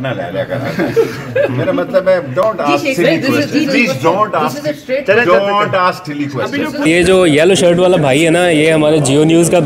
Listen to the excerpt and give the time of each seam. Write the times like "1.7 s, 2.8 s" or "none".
6.9 s

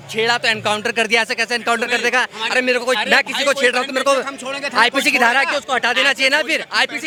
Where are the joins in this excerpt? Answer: none

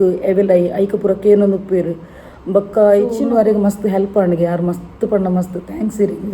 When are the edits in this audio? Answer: 3.2 s

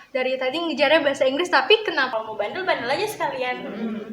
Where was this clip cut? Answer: 2.1 s

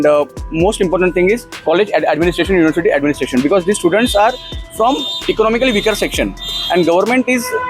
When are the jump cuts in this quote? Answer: 1.5 s

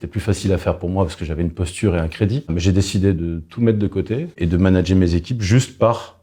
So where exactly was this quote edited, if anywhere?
2.5 s, 4.3 s

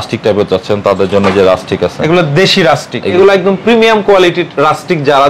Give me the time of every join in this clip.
3.1 s

